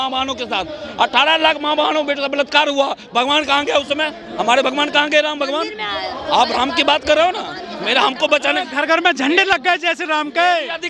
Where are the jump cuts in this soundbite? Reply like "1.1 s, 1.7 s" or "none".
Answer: none